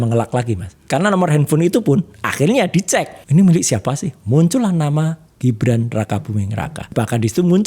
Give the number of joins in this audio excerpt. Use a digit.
2